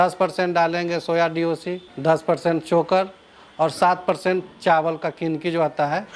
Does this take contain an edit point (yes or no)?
no